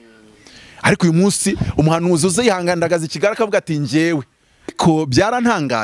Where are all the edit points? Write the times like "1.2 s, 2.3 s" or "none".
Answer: 4.8 s